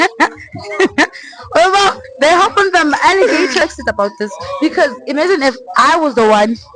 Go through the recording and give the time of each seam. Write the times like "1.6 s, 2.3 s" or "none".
3.6 s